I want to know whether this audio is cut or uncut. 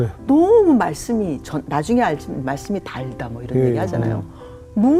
uncut